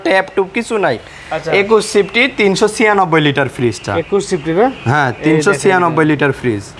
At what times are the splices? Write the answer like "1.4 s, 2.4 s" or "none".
none